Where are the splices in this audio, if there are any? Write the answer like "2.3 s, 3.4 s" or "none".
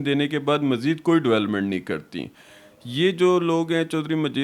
none